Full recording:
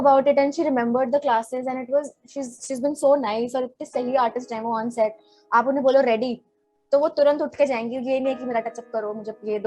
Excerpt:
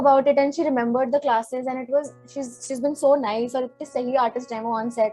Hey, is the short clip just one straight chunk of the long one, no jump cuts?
yes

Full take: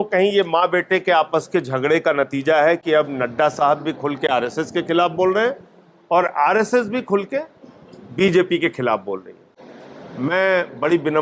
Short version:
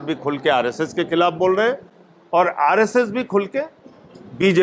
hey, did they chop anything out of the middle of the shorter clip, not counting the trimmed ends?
no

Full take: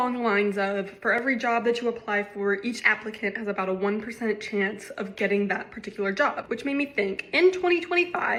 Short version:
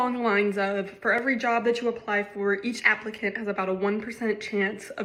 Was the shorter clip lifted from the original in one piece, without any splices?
yes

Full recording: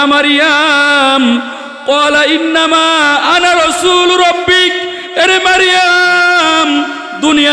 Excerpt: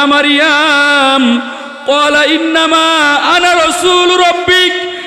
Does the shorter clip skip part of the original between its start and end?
no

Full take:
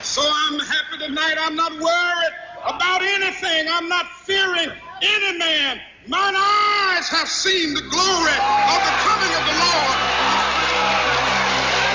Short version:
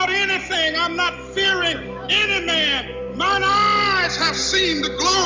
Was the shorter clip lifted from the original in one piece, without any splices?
yes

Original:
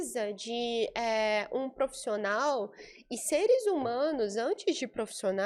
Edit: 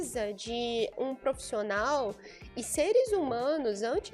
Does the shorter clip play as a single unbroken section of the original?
no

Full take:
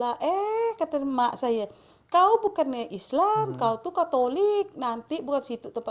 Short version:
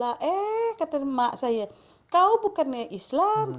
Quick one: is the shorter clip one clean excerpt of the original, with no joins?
yes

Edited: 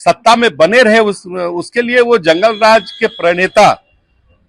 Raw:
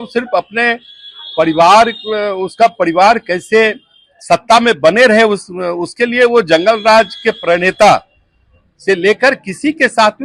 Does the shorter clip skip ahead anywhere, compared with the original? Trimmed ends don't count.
no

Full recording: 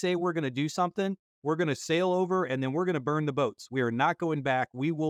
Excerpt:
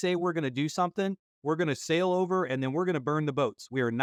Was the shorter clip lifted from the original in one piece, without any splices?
yes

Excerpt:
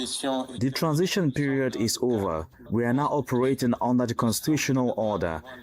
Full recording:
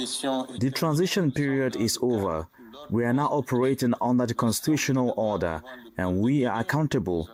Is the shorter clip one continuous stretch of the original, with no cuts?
no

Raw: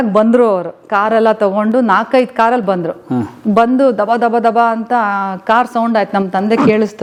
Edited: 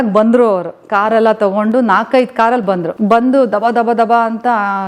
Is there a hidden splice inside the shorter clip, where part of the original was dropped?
yes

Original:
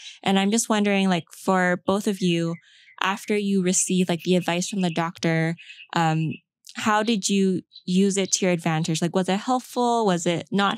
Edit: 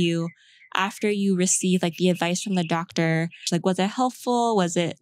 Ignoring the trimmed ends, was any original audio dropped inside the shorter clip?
yes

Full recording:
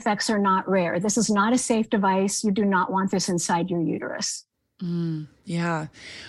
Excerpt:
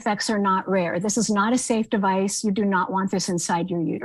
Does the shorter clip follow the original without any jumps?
yes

